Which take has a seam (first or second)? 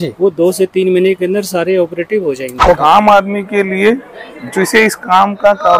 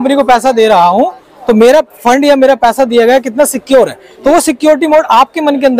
first